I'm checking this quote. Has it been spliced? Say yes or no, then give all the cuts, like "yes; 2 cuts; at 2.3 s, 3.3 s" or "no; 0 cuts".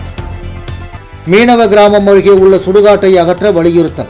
yes; 1 cut; at 1.1 s